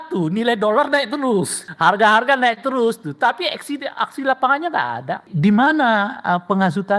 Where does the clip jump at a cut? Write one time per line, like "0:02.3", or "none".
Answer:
0:01.6
0:05.3